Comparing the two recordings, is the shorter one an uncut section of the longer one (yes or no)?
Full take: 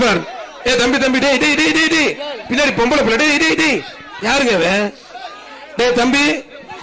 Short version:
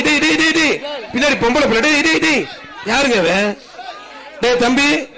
yes